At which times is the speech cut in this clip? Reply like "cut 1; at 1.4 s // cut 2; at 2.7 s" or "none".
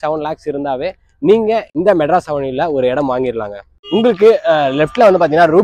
cut 1; at 1.7 s // cut 2; at 3.7 s